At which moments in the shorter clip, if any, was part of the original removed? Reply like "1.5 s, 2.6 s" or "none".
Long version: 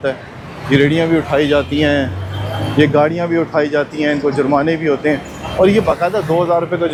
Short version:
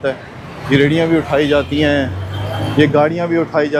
none